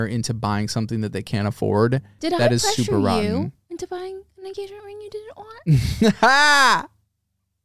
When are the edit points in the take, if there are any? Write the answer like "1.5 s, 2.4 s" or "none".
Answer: 2.1 s